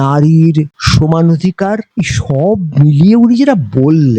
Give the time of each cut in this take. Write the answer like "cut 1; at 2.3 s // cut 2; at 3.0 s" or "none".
cut 1; at 1.9 s